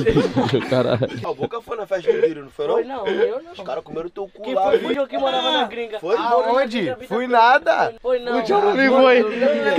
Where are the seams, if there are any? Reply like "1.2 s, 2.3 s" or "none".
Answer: 1.2 s, 4.9 s, 8.0 s